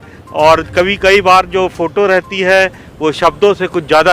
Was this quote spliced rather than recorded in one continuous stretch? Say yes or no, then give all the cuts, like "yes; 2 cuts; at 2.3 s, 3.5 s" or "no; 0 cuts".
no; 0 cuts